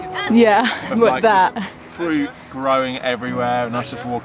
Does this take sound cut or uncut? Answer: uncut